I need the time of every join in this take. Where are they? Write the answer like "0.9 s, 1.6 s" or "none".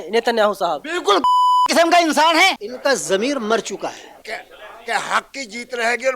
2.7 s, 4.2 s